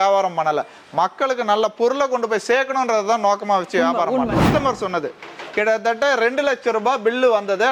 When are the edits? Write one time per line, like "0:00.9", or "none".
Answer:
0:04.5